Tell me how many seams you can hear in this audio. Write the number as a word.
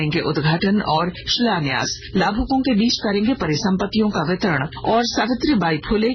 two